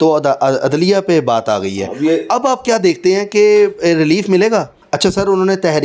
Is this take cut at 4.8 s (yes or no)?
yes